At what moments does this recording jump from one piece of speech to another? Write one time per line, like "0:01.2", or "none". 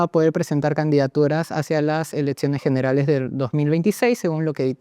none